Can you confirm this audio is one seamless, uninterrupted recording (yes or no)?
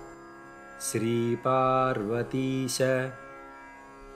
no